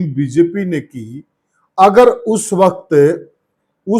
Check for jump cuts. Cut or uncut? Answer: uncut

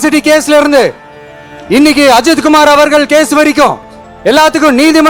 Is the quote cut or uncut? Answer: uncut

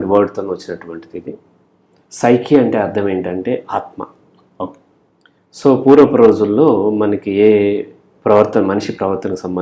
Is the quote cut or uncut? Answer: uncut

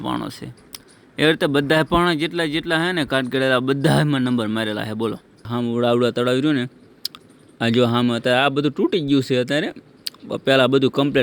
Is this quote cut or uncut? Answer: cut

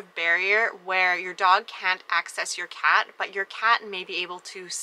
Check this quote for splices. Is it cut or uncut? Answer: uncut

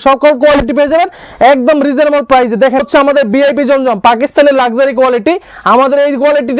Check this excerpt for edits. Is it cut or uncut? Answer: cut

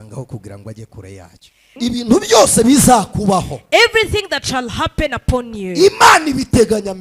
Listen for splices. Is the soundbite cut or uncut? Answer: cut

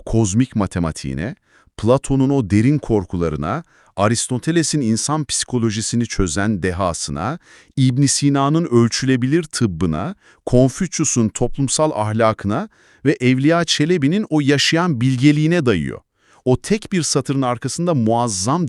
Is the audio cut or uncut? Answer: uncut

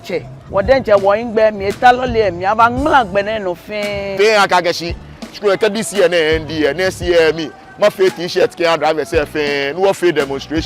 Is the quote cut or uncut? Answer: cut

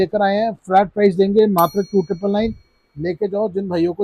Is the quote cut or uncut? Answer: uncut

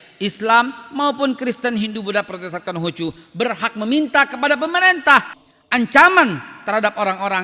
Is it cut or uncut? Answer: cut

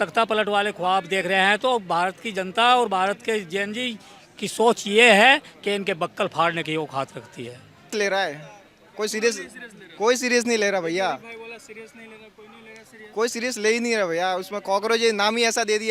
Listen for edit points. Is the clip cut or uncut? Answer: cut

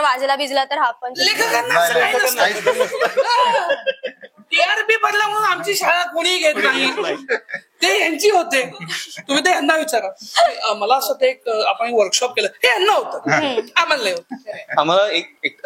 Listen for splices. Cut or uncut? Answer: uncut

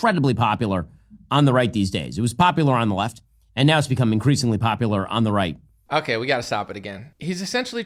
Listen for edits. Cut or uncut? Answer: uncut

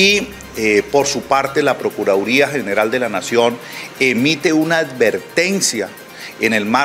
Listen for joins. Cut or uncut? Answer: uncut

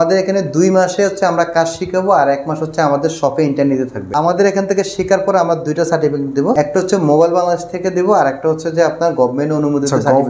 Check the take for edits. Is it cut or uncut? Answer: cut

